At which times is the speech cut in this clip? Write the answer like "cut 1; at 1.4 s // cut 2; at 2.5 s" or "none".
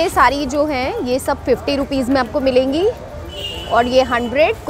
none